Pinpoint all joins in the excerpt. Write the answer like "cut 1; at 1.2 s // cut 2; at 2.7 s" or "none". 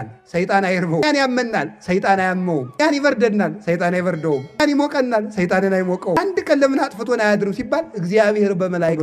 cut 1; at 1.0 s // cut 2; at 2.8 s // cut 3; at 4.6 s // cut 4; at 6.2 s